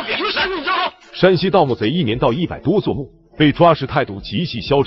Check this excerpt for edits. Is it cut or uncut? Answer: cut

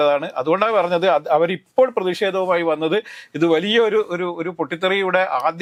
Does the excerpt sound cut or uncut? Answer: uncut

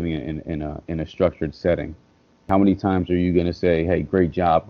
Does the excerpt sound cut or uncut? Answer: cut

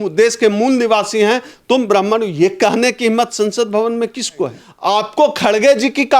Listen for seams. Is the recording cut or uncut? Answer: cut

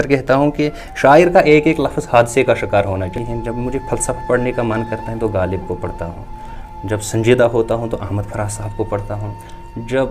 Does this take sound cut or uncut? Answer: cut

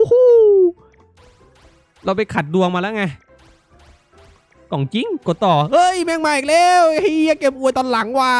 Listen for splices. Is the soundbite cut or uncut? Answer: uncut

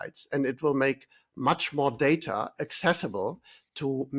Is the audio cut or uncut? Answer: uncut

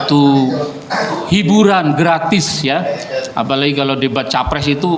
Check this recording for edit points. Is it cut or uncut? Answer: uncut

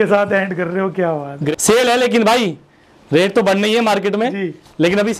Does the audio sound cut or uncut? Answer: cut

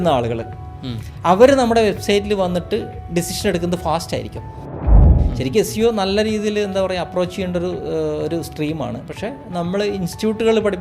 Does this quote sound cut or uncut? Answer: cut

